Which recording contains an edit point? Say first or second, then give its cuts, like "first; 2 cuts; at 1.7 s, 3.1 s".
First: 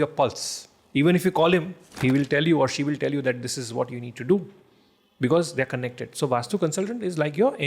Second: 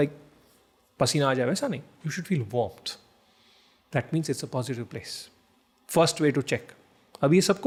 first; 1 cut; at 1.8 s